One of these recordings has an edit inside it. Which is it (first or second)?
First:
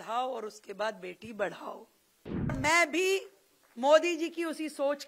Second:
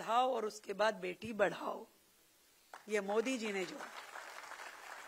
first